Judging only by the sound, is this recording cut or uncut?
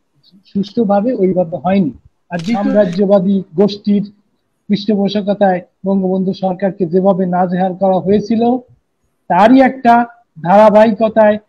cut